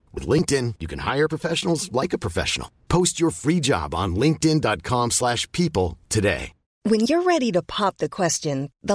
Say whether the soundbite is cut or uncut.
cut